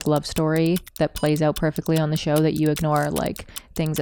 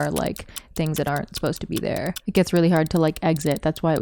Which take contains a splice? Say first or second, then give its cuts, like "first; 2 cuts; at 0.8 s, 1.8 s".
second; 1 cut; at 2.1 s